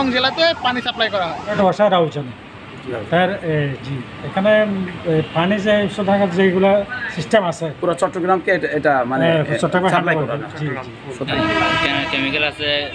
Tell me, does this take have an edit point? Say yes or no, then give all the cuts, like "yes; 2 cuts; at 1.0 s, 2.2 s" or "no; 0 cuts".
yes; 2 cuts; at 1.5 s, 11.3 s